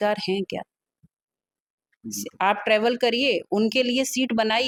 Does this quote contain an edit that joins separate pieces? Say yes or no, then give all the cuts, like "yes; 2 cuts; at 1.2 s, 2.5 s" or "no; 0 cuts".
no; 0 cuts